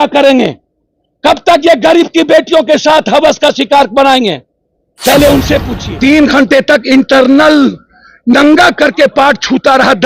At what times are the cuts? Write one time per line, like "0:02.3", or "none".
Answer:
0:05.8